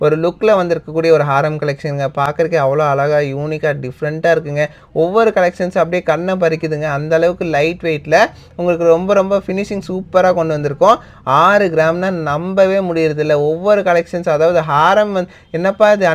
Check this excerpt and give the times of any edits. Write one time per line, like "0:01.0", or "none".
none